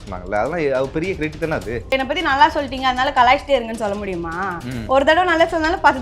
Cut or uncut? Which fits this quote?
cut